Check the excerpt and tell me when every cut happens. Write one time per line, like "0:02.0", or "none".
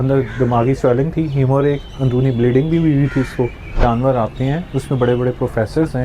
0:03.8